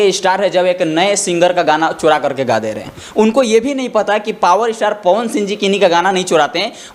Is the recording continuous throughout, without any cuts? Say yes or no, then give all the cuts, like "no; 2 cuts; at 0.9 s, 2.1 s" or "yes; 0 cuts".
yes; 0 cuts